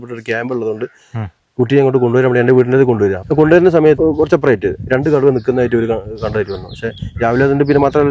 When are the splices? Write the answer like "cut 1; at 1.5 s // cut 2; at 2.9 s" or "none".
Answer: cut 1; at 3.2 s // cut 2; at 4.0 s